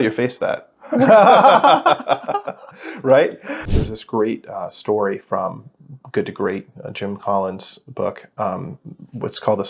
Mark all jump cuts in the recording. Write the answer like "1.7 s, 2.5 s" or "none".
3.6 s